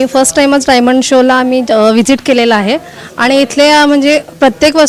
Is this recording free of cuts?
yes; 0 cuts

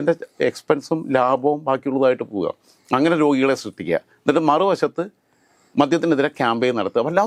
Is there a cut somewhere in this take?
no; 0 cuts

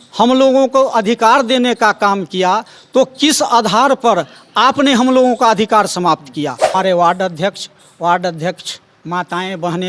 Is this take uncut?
no; 1 cut; at 6.7 s

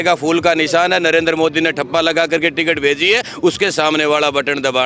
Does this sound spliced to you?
no; 0 cuts

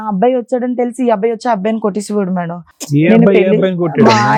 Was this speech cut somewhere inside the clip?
no; 0 cuts

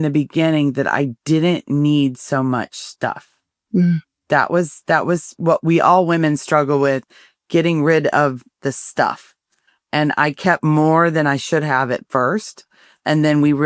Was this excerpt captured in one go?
yes; 0 cuts

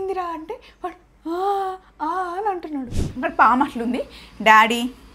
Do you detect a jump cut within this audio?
yes; 1 cut; at 3.0 s

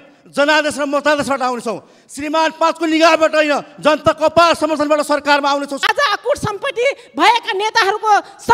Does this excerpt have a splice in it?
yes; 1 cut; at 5.7 s

